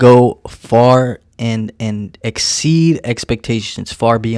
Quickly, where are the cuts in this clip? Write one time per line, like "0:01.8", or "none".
none